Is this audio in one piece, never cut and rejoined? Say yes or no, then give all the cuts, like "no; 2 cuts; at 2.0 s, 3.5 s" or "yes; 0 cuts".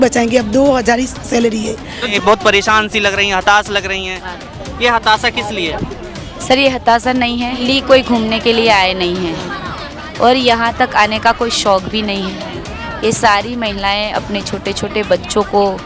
no; 2 cuts; at 2.1 s, 7.6 s